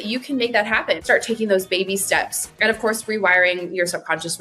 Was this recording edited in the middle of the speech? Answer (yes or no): yes